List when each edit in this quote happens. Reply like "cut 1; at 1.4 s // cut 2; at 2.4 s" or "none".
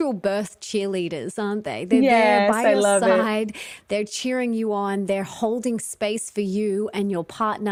none